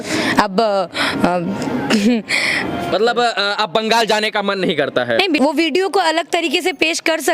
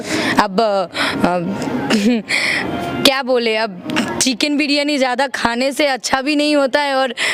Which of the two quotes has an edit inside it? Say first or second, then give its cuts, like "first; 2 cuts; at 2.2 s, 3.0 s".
first; 2 cuts; at 2.9 s, 5.4 s